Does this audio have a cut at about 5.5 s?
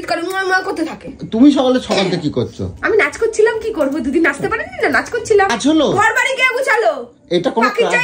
yes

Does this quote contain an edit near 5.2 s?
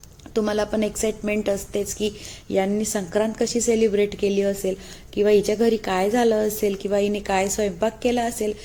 no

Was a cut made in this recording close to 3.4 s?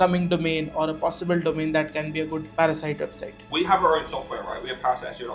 yes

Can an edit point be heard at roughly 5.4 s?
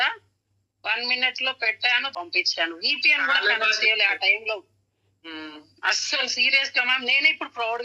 no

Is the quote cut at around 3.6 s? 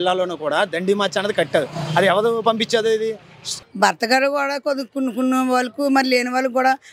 yes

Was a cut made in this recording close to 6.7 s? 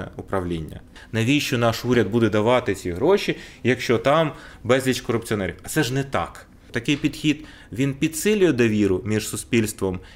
yes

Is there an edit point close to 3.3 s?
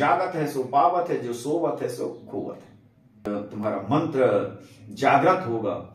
yes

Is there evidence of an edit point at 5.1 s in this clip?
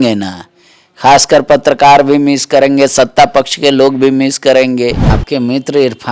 yes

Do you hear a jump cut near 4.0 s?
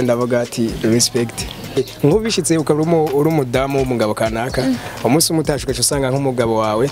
no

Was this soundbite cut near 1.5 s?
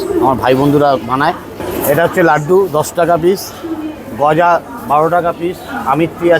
yes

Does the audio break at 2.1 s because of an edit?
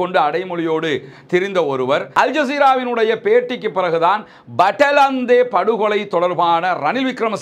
yes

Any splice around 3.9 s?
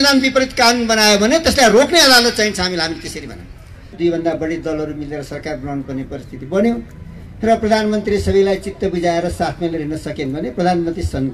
yes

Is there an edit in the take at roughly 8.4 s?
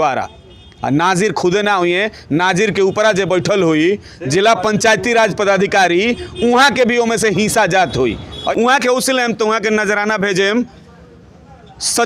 yes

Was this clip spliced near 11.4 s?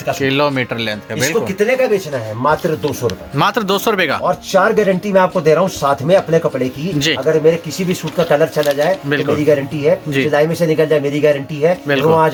no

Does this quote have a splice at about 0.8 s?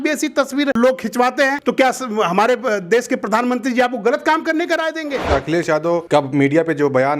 yes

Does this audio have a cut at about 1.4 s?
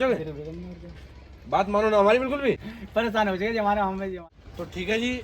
no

